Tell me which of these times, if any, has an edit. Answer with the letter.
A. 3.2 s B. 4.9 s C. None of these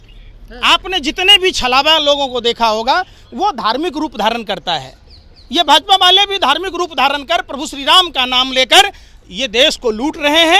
C